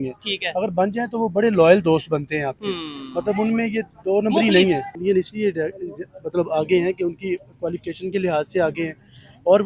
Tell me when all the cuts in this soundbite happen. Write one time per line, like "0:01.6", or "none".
0:04.9